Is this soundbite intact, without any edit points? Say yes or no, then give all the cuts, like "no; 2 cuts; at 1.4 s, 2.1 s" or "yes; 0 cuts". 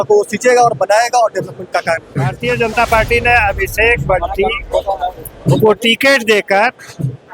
no; 1 cut; at 2.4 s